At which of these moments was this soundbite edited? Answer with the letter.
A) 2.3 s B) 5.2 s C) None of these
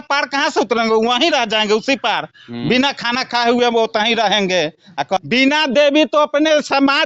B